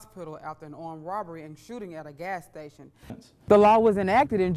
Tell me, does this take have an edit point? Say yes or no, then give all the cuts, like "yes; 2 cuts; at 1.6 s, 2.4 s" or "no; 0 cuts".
yes; 1 cut; at 3.2 s